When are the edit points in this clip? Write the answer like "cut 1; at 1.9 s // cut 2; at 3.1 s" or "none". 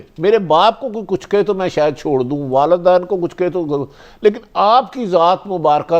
none